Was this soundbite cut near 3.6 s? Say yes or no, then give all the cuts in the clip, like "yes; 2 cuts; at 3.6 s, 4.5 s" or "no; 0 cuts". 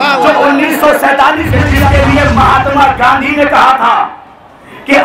no; 1 cut; at 1.7 s